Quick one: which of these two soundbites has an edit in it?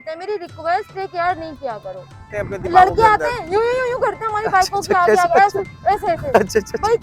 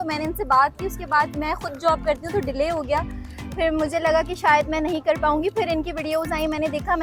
first; 1 cut; at 2.3 s

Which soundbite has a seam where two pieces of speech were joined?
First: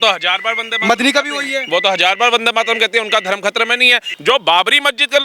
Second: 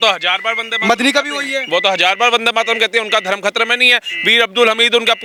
first; 1 cut; at 4.1 s

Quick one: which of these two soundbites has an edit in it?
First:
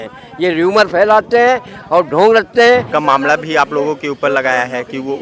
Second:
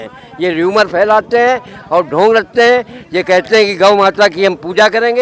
first; 1 cut; at 2.9 s

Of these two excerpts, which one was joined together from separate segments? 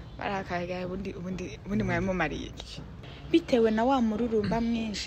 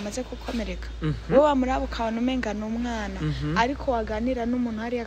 first; 1 cut; at 2.9 s

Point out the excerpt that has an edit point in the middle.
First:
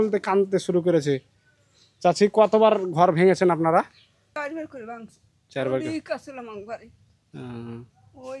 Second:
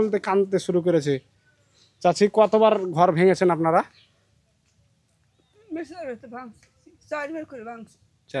first; 1 cut; at 4.4 s

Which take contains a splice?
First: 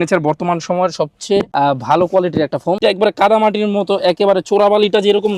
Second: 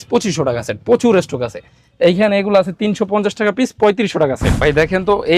second; 1 cut; at 4.5 s

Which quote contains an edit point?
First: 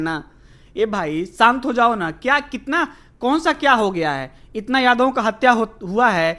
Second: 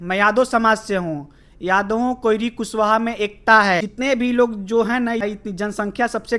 second; 2 cuts; at 3.9 s, 5.2 s

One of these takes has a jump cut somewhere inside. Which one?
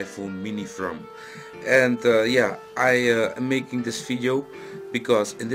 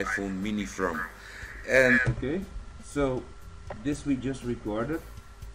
first; 1 cut; at 1.5 s

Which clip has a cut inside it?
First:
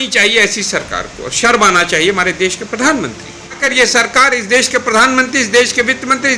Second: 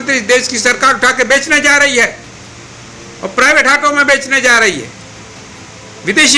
first; 1 cut; at 3.6 s

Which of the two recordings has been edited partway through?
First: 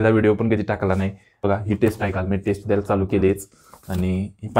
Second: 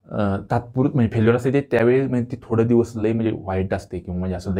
first; 1 cut; at 1.4 s

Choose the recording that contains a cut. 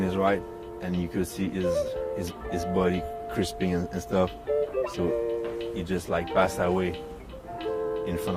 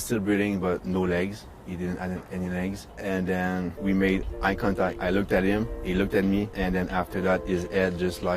second; 5 cuts; at 0.8 s, 2.9 s, 3.7 s, 5.0 s, 6.5 s

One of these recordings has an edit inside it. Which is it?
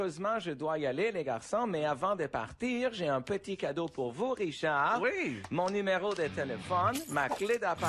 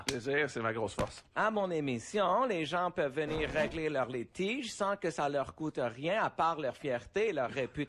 second; 1 cut; at 1.1 s

